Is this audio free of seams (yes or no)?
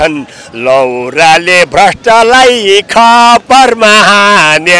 yes